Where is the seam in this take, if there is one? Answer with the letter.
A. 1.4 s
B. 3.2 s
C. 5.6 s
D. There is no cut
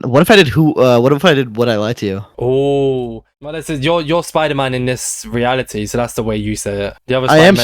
B